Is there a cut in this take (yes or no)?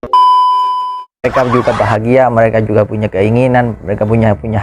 yes